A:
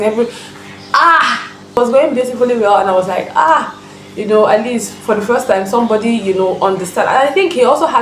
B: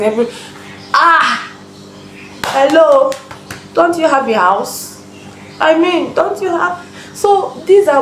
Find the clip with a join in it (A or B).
A